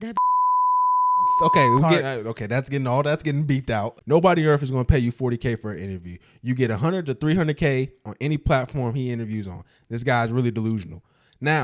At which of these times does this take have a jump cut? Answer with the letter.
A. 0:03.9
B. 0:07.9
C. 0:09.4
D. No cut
A